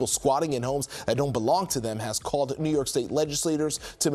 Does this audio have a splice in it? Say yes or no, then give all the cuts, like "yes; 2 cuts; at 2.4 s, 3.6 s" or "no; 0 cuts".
no; 0 cuts